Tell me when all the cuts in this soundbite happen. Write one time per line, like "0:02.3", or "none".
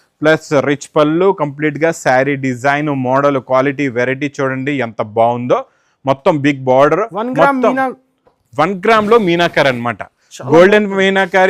none